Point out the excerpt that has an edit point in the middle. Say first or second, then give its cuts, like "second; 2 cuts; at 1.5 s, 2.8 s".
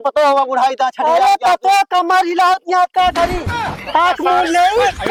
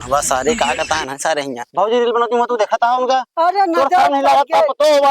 second; 1 cut; at 1.6 s